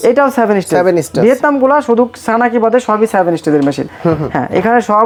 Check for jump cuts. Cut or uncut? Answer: uncut